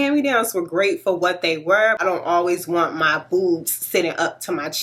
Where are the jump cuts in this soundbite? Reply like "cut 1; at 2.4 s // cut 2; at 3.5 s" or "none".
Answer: cut 1; at 2.0 s